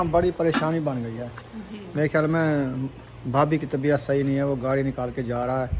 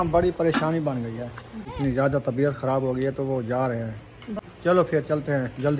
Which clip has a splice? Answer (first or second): second